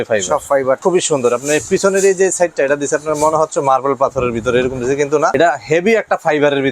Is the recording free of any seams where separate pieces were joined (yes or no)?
no